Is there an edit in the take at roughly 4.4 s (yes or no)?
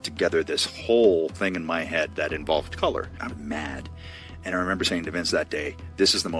no